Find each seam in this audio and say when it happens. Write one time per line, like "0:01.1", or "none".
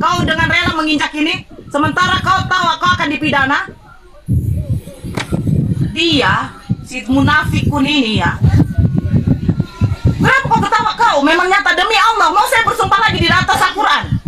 0:08.4